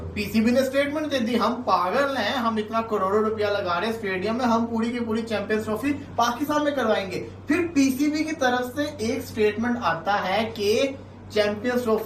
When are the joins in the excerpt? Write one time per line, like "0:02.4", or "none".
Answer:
none